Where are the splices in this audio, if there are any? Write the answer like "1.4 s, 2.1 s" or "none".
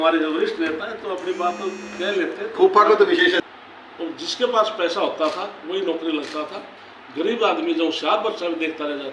3.4 s